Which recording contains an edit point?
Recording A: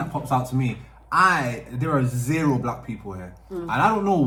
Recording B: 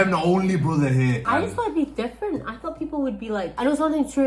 B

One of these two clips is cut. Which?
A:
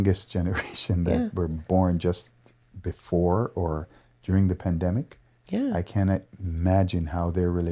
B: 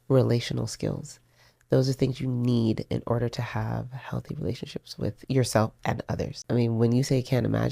B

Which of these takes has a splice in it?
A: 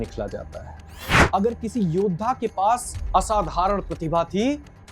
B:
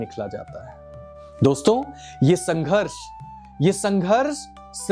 A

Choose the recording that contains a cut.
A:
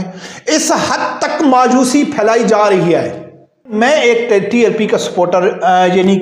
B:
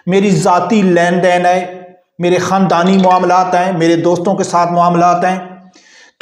A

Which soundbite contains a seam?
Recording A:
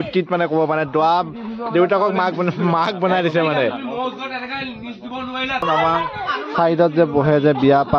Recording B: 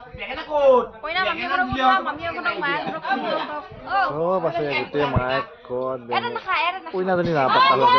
A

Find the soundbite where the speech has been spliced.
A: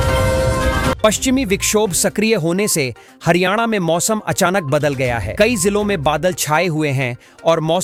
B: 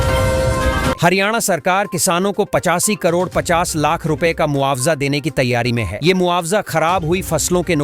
B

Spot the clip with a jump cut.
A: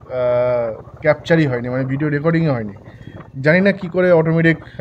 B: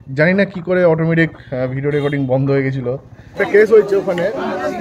B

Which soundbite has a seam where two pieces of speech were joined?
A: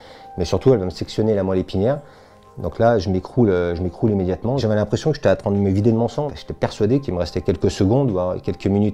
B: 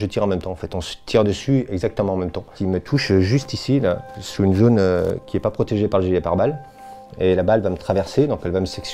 A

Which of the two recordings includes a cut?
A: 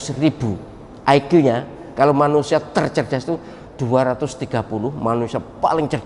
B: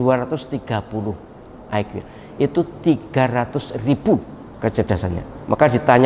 B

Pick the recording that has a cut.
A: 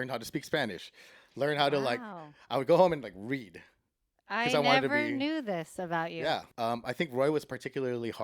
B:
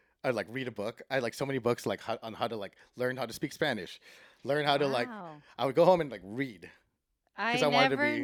A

